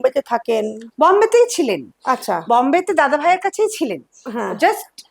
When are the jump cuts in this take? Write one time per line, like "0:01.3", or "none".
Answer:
none